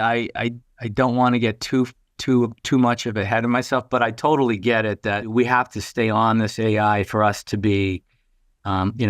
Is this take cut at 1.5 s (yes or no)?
no